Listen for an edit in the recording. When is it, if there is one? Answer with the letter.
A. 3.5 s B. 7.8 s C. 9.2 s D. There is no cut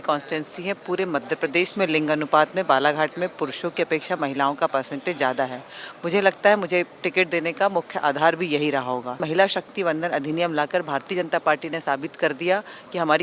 C